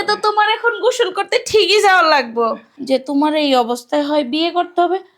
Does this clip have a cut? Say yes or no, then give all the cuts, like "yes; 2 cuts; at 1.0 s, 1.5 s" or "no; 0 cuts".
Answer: yes; 1 cut; at 2.7 s